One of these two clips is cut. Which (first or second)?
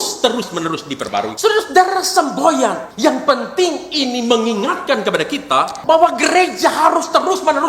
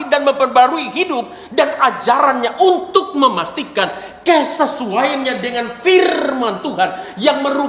first